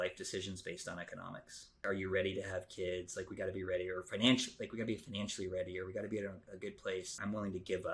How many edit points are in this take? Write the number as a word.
two